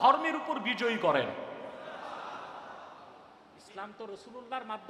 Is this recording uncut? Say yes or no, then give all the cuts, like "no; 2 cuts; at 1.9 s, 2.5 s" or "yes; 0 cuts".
yes; 0 cuts